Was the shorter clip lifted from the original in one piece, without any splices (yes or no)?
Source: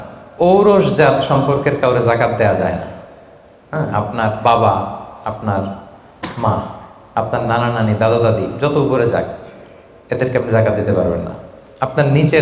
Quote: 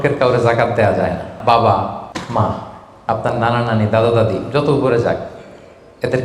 no